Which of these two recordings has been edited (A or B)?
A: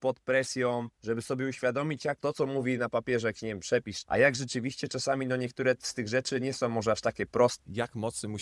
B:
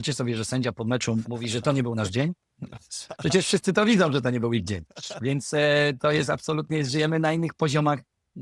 A